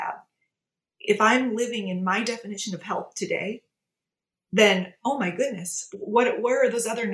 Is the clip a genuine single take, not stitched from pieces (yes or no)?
yes